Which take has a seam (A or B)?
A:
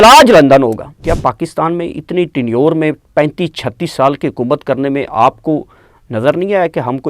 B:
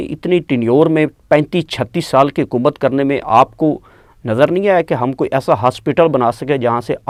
A